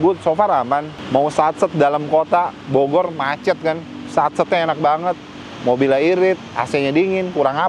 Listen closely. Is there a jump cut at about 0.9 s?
yes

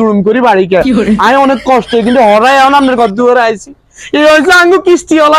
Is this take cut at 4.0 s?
no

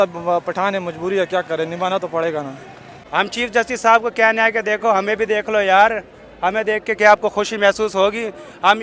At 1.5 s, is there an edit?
no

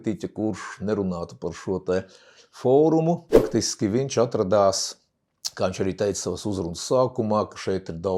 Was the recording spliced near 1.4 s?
no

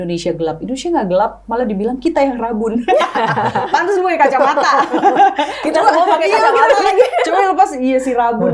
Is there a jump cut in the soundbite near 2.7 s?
no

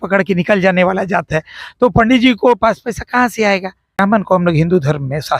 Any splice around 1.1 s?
no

